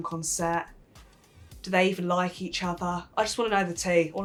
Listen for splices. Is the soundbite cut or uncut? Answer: uncut